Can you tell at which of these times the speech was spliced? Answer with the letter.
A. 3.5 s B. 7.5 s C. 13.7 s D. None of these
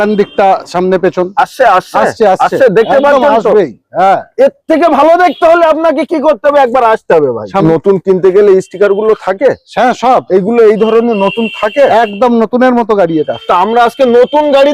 B